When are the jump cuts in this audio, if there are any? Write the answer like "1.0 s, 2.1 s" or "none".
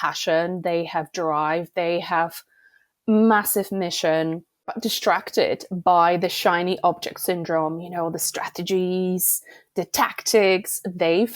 4.7 s